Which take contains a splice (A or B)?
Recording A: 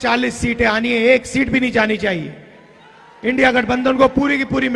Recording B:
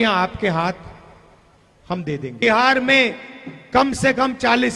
B